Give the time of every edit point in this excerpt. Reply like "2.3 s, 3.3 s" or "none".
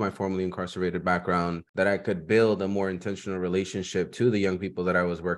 1.6 s